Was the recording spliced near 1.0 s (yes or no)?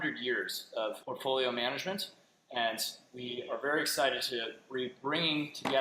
yes